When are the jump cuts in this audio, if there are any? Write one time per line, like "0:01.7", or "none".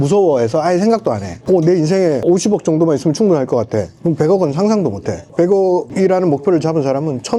none

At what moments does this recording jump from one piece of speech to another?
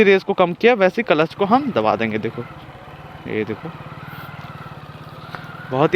none

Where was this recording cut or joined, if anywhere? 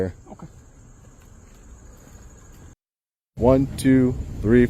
0:03.4

